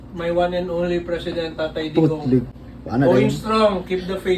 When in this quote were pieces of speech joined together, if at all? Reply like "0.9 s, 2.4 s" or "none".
2.5 s